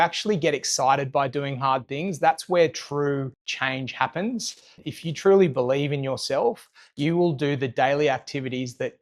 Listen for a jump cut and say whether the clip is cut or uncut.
cut